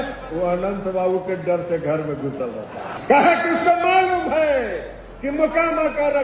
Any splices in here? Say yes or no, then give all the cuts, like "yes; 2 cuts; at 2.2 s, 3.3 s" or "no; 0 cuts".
yes; 1 cut; at 2.9 s